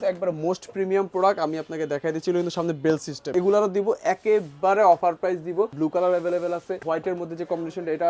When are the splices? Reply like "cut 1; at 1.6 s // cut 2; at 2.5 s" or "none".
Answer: cut 1; at 3.3 s // cut 2; at 5.7 s // cut 3; at 6.8 s